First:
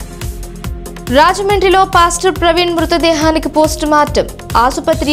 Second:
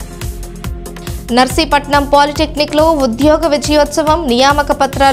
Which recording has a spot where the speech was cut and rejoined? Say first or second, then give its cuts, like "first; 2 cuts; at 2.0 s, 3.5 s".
first; 1 cut; at 0.9 s